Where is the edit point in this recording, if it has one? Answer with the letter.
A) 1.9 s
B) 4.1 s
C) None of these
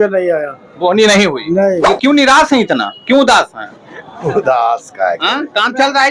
A